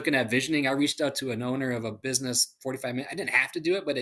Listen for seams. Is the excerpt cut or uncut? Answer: uncut